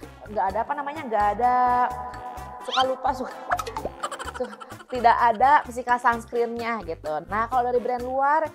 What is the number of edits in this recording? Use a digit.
1